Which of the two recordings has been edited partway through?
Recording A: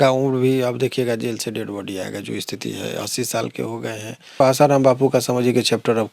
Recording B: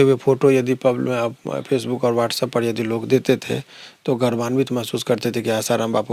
A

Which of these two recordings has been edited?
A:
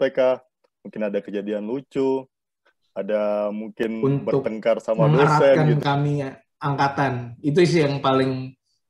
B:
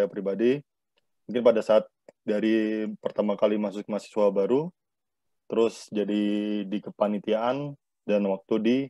A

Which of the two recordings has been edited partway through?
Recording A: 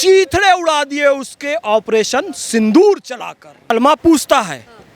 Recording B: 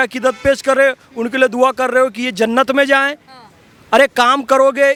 A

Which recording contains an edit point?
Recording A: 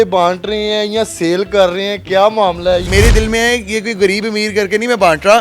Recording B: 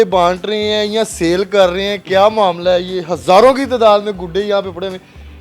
A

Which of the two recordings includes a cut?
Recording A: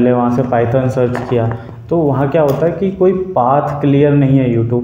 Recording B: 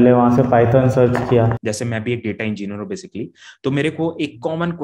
B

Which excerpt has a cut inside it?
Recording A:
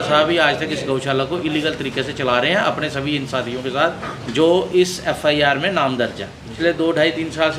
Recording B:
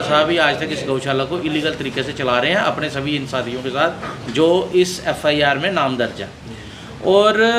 A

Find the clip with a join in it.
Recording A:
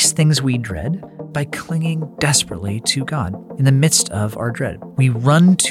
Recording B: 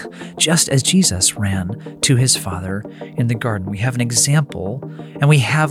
A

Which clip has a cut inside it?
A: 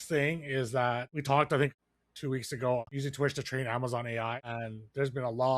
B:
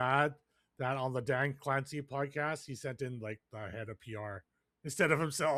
A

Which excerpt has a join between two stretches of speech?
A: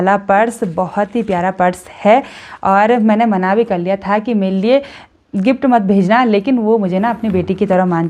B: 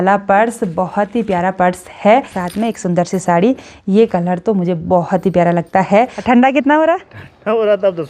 B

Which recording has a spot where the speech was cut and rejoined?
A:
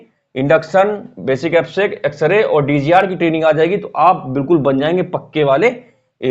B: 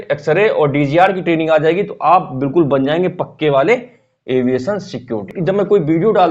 B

